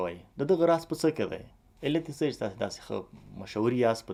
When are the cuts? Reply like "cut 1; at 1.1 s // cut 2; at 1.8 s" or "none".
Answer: none

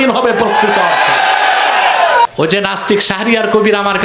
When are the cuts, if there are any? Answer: cut 1; at 2.2 s

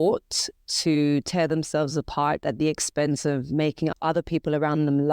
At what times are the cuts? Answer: cut 1; at 3.9 s

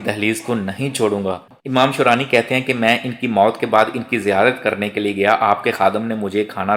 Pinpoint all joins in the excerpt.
cut 1; at 1.4 s

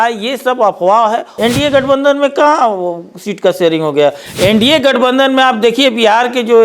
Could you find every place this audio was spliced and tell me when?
cut 1; at 1.3 s

